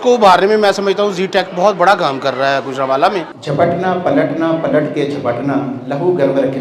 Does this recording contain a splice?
yes; 1 cut; at 3.3 s

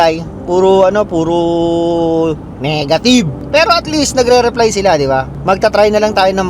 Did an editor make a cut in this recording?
yes; 2 cuts; at 3.4 s, 5.3 s

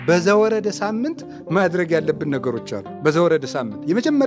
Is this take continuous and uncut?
yes; 0 cuts

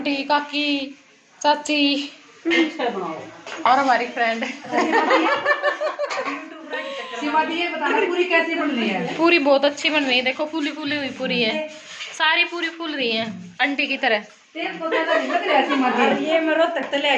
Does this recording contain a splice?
no; 0 cuts

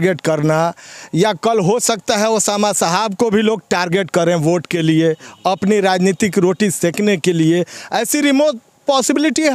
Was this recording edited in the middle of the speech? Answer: no; 0 cuts

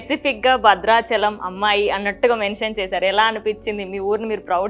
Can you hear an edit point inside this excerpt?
no; 0 cuts

